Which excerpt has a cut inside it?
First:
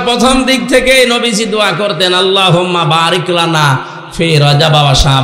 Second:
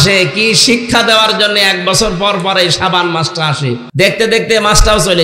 second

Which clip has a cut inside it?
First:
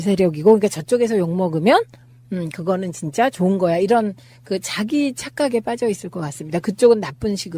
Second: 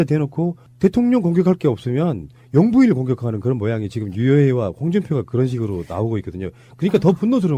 first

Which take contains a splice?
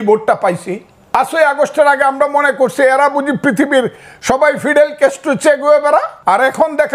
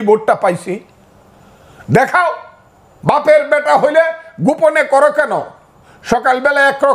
first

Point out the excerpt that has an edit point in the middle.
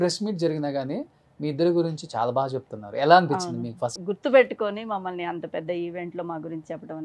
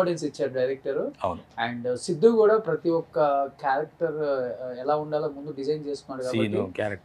first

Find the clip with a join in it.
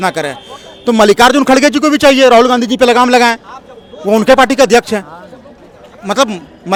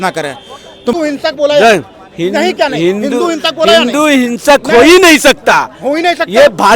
second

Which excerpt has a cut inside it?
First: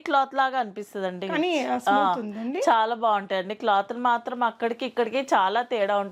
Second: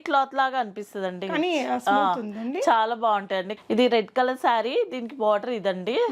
second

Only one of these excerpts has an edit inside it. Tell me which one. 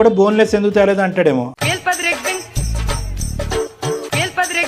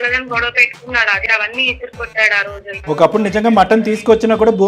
second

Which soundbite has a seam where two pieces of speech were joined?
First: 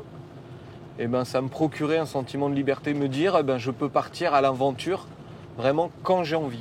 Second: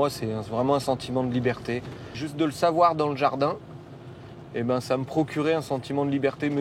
second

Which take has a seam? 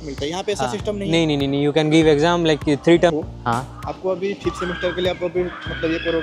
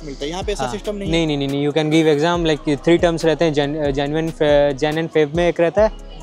first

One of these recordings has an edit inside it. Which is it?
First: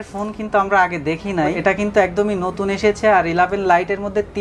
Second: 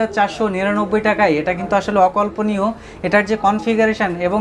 first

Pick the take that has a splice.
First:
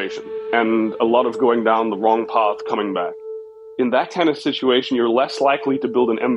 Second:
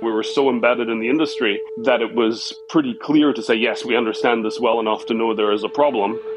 first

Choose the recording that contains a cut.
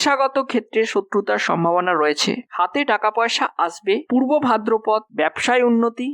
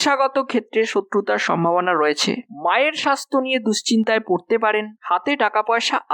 first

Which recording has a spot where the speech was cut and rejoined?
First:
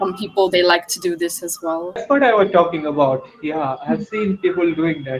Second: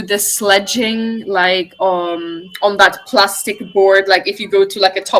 first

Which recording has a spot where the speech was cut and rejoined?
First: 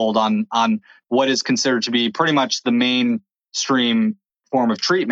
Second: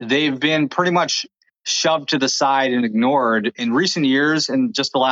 second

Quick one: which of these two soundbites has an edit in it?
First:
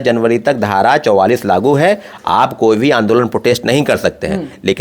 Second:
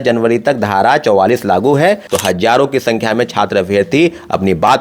second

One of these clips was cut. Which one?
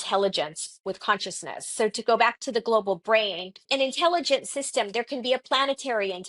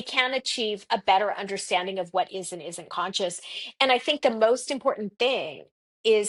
first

